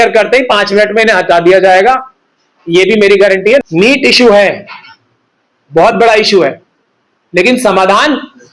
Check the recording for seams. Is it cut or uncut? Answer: cut